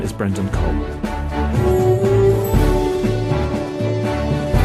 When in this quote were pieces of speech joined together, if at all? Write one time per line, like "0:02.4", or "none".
none